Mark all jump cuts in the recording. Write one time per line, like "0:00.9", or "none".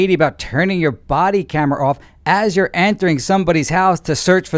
none